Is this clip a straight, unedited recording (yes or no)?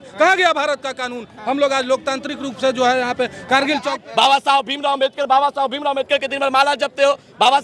no